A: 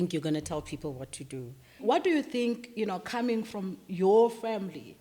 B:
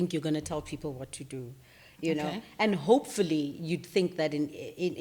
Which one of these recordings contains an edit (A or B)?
A